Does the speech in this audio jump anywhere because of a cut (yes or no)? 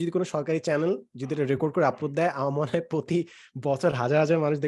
no